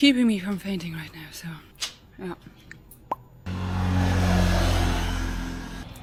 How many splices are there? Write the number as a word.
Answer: zero